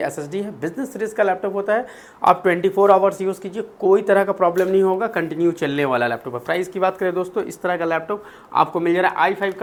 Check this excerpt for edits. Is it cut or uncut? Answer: uncut